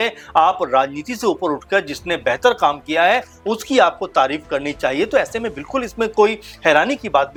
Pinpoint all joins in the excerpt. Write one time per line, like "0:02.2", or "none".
none